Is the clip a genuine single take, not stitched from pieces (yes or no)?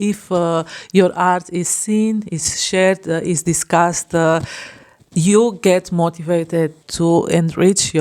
yes